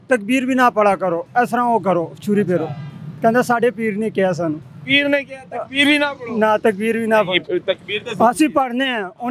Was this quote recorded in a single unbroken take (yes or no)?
yes